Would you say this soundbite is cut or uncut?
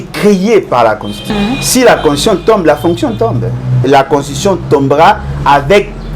cut